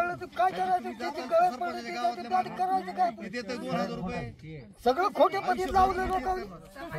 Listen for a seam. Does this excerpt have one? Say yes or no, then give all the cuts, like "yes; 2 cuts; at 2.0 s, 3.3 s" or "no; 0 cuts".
no; 0 cuts